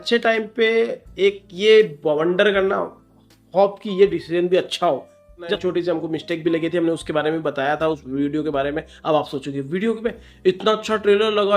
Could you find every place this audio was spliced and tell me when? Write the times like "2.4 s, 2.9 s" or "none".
5.6 s